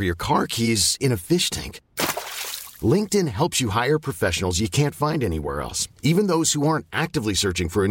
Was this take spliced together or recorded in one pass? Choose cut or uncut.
uncut